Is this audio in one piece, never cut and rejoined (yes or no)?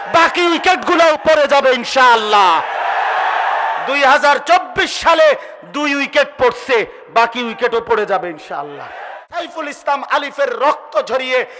no